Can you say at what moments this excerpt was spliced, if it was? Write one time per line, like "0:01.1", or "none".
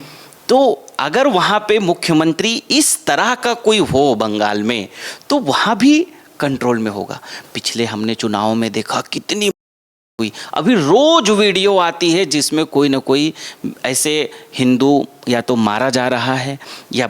none